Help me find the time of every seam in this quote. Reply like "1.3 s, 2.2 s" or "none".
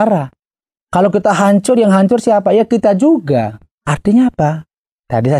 3.6 s